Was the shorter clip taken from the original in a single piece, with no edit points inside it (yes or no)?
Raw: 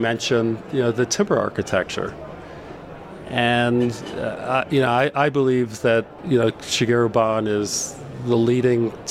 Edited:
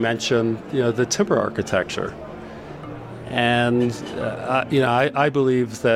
yes